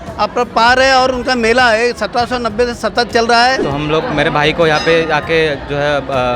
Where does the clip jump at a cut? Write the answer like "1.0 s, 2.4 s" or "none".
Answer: 3.6 s